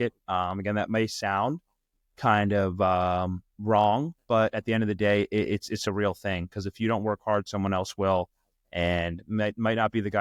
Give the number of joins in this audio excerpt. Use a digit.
0